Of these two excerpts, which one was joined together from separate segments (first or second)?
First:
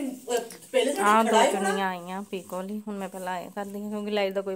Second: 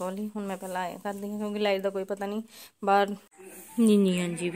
second